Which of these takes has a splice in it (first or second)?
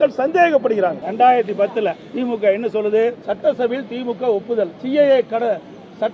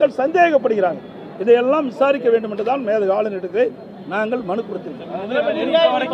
first